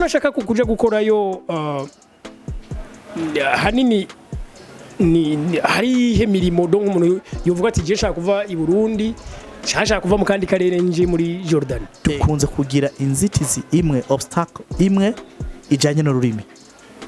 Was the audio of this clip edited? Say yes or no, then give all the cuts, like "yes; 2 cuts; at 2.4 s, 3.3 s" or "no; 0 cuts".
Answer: yes; 1 cut; at 11.9 s